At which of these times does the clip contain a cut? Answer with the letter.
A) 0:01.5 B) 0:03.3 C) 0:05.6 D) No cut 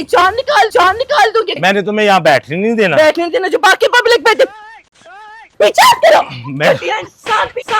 A